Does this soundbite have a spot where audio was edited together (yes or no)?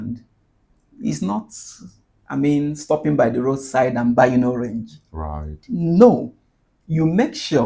no